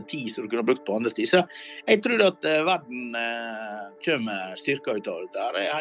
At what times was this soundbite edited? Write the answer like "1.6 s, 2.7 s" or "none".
none

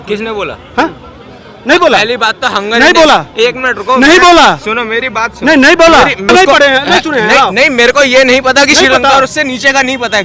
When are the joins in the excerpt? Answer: 6.3 s

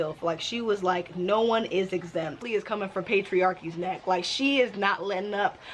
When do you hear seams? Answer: 2.4 s

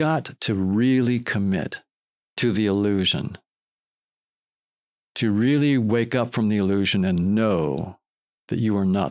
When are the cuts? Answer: none

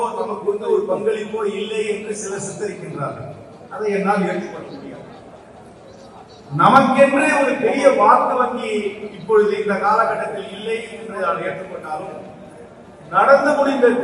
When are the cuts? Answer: none

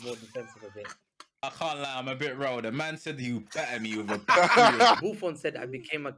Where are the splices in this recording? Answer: 1.4 s, 5.0 s

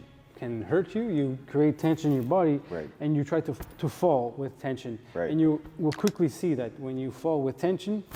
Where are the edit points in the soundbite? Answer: none

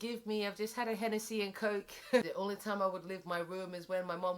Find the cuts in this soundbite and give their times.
2.2 s

